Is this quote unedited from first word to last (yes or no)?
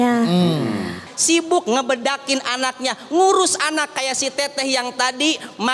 no